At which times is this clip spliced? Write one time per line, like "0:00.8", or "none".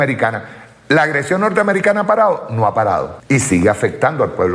0:03.1

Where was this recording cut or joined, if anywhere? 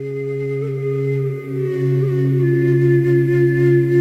none

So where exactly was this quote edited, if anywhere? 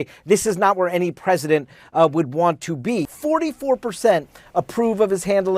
0:03.1

